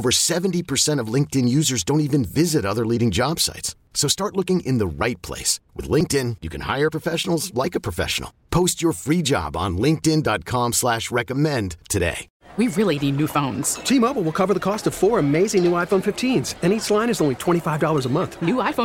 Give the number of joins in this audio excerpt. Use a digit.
1